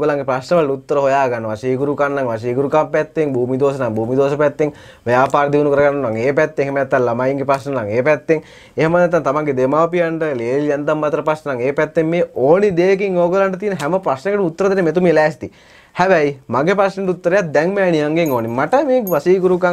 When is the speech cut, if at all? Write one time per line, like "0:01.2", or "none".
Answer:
none